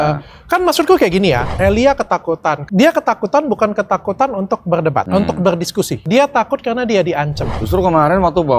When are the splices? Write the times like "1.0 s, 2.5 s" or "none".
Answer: 1.5 s, 2.6 s, 5.1 s, 6.0 s, 7.5 s